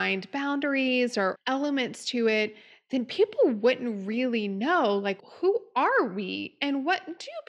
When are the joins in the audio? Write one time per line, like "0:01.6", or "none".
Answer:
0:01.4
0:05.2